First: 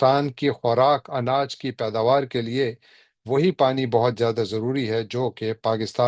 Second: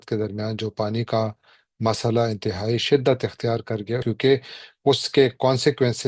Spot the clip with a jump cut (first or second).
second